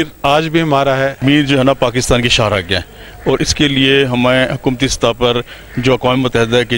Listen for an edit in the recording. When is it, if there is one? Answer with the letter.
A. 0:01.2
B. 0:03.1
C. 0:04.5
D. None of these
A